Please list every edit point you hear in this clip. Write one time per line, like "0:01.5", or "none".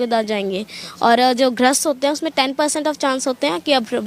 none